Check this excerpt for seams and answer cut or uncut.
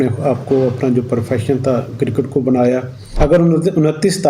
cut